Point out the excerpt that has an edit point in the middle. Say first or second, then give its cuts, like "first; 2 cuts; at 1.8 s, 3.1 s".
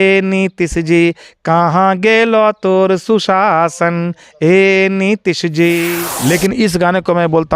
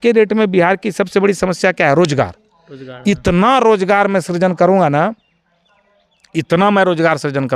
first; 1 cut; at 5.9 s